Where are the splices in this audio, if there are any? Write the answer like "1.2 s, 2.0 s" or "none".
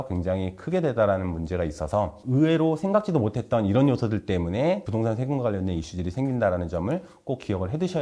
none